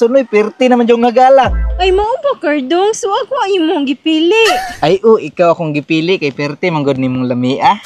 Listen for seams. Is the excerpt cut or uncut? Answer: uncut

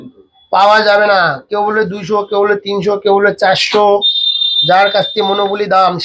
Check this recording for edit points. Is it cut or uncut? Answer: uncut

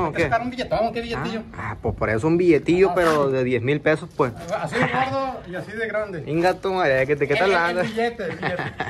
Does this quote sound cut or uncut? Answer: uncut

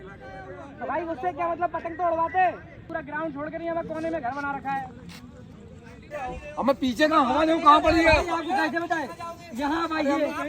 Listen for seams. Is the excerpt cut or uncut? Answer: cut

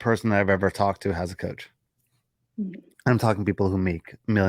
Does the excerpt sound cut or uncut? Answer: uncut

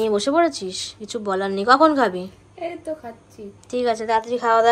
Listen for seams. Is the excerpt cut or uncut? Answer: uncut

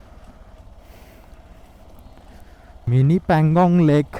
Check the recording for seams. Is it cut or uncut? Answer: cut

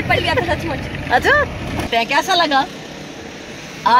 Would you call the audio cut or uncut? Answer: cut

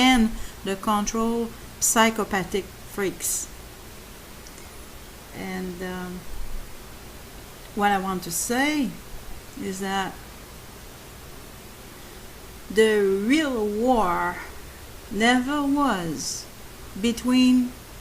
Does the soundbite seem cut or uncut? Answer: cut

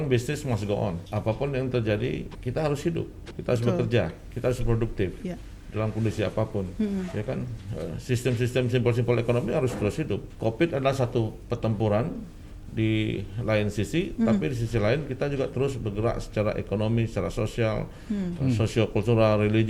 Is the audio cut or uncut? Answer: cut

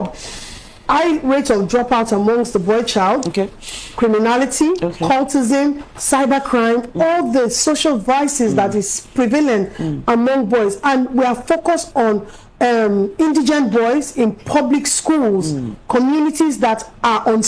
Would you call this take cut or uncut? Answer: uncut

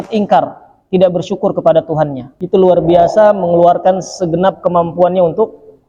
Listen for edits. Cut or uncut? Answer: cut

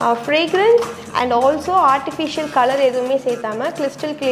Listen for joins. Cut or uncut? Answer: uncut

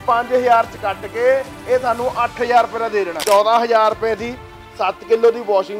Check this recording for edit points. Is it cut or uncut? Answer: cut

